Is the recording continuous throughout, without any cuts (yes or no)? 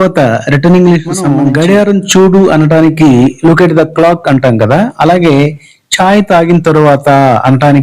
no